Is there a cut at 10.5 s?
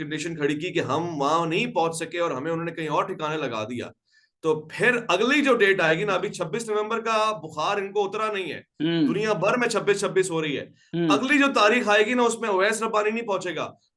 no; 0 cuts

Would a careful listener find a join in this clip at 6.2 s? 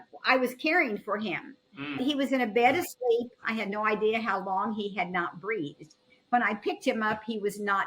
no; 2 cuts; at 2.0 s, 3.4 s

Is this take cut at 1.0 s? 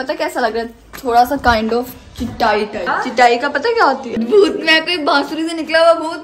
no; 2 cuts; at 2.9 s, 4.1 s

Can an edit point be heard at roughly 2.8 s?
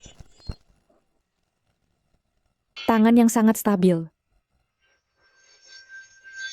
yes; 2 cuts; at 1.2 s, 2.8 s

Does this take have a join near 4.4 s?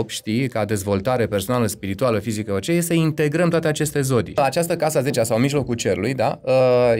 yes; 1 cut; at 4.4 s

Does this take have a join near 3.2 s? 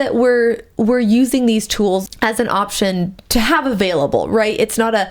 yes; 2 cuts; at 2.1 s, 3.2 s

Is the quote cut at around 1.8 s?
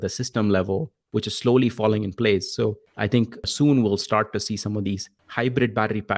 no; 2 cuts; at 3.4 s, 5.2 s

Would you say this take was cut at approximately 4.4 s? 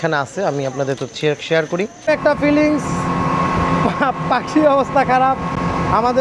no; 1 cut; at 2.0 s

